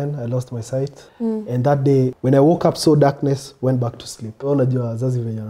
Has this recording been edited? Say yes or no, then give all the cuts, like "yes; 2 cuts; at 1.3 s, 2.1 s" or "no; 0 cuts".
yes; 3 cuts; at 1.0 s, 2.2 s, 4.4 s